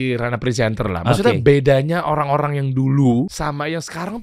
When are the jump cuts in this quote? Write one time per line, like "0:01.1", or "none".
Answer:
0:03.3